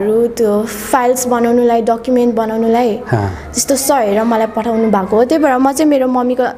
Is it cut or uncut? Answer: uncut